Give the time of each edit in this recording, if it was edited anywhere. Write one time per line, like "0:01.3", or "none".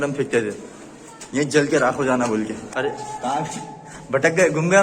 0:02.7

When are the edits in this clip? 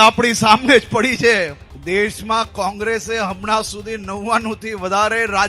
0:01.7

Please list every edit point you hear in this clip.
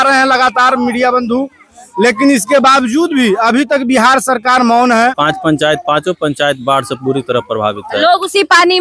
0:05.2

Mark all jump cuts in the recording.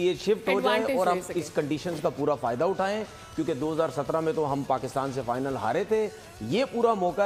none

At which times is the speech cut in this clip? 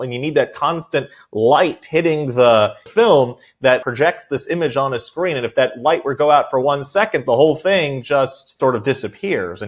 0:02.8
0:03.8
0:08.6

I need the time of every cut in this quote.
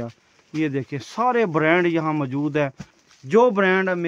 0:03.0

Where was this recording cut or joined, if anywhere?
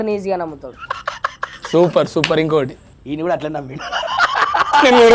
0:02.9

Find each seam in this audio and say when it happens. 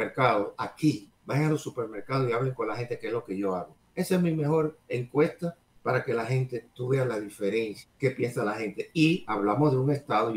0:01.1
0:03.8
0:05.7
0:07.8

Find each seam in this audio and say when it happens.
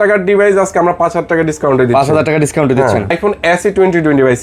0:03.1

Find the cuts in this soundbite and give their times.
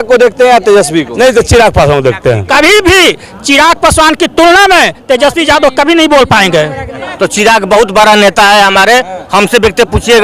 0:02.4
0:07.1

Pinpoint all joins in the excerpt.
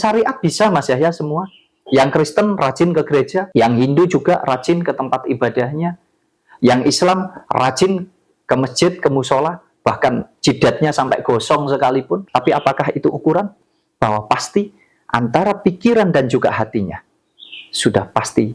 0:03.5
0:12.2

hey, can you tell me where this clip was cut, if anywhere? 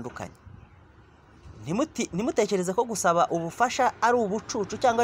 none

